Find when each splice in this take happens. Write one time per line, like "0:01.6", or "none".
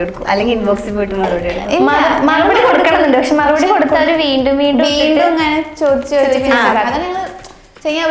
none